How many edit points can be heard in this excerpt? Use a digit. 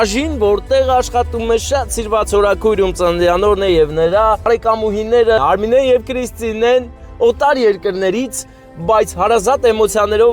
2